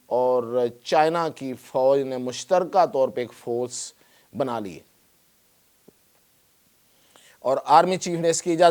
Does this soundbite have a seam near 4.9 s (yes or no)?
no